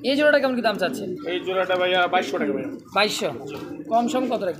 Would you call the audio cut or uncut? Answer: uncut